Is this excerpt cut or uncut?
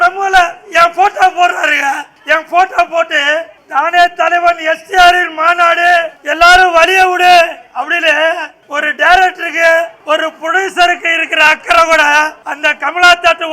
cut